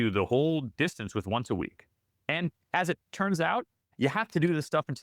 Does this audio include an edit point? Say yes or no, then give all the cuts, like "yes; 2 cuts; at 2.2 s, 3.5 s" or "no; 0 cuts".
no; 0 cuts